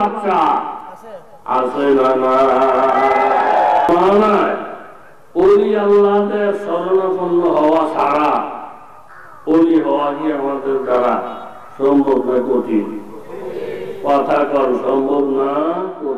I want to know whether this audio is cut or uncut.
cut